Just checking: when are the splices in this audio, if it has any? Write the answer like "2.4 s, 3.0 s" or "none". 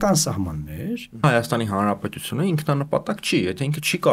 1.2 s